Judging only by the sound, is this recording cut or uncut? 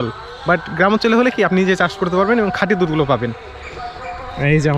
uncut